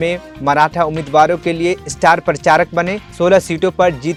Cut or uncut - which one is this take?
uncut